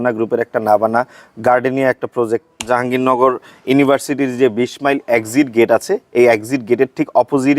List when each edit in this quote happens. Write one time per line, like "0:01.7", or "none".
0:02.6